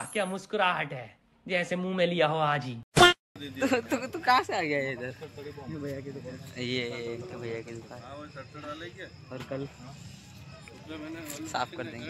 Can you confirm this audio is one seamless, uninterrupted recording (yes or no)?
no